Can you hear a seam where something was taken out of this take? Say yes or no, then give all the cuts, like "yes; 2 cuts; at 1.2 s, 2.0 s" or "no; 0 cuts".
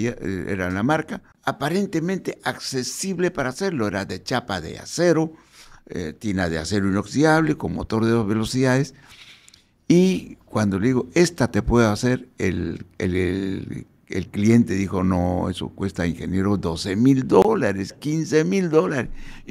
yes; 1 cut; at 1.2 s